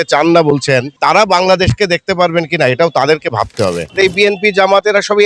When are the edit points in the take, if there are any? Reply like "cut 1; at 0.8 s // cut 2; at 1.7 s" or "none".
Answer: cut 1; at 3.9 s